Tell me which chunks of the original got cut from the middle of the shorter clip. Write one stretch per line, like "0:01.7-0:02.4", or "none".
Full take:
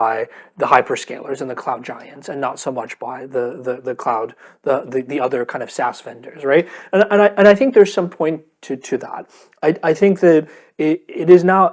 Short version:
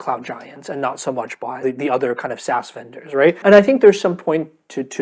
0:03.2-0:04.9
0:06.7-0:07.3